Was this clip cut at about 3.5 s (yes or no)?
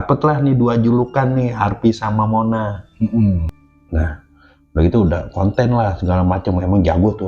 yes